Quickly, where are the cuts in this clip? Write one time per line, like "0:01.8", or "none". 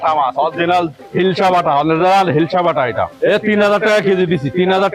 0:01.0
0:03.0